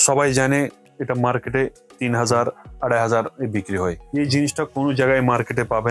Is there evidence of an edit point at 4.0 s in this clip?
yes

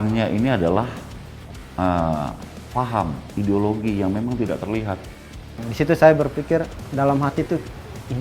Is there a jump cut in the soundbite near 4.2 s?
no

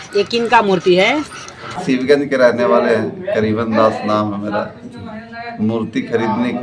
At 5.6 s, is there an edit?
no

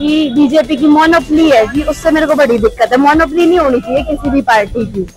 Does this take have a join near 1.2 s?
no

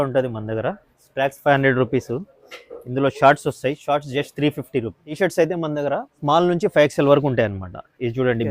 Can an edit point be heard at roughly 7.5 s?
no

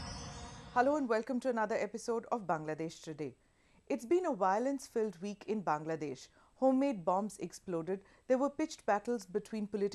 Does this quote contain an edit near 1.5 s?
yes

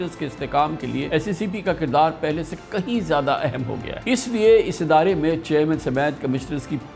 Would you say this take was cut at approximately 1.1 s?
yes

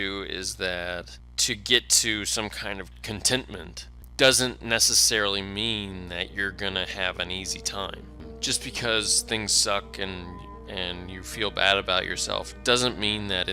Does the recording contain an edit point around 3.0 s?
yes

